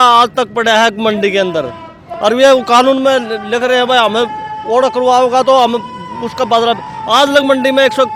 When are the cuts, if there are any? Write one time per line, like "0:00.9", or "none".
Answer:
none